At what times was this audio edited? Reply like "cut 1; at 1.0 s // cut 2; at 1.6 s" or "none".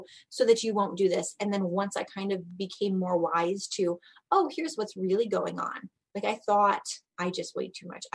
cut 1; at 7.0 s